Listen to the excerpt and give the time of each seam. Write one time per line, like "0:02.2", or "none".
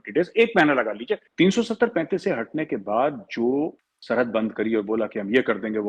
0:01.3
0:03.9

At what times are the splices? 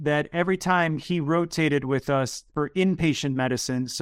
0:02.4

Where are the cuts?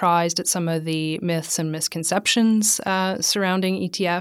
none

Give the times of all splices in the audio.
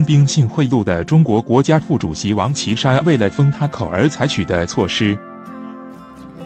0:05.2

